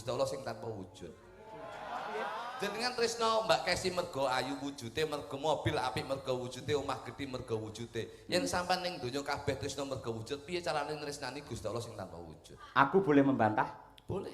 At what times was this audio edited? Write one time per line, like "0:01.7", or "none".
0:02.5